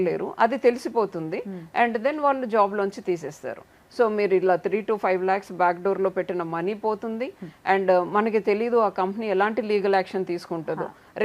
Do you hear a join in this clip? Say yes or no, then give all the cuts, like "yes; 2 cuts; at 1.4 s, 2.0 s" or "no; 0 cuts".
no; 0 cuts